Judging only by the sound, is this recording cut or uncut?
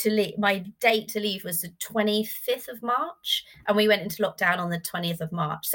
uncut